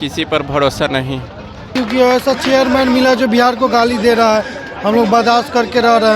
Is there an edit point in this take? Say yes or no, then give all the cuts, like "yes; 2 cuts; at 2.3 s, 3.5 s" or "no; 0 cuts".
yes; 1 cut; at 1.7 s